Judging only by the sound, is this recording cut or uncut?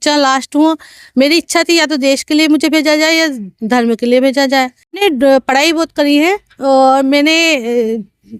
cut